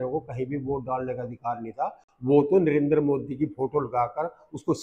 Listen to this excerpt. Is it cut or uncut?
uncut